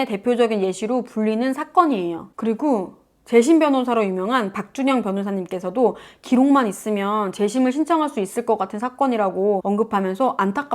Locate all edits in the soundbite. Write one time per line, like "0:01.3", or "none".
0:09.6